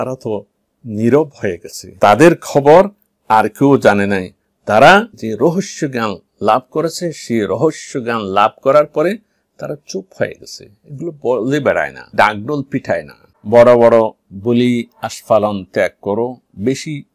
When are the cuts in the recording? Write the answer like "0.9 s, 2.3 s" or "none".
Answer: 5.2 s, 13.3 s